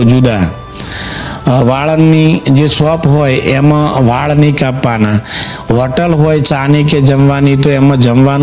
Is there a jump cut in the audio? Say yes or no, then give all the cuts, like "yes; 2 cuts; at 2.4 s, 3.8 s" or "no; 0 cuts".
no; 0 cuts